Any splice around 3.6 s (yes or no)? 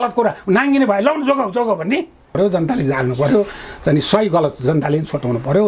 no